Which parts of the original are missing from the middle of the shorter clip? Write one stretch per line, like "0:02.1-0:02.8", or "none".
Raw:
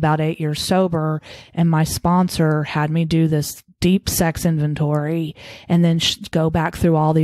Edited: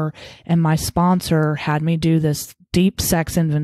none